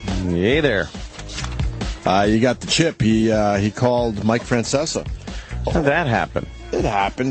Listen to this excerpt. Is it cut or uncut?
uncut